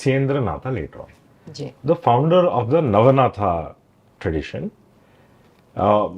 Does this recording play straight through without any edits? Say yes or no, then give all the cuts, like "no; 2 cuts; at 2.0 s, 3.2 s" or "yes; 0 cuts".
yes; 0 cuts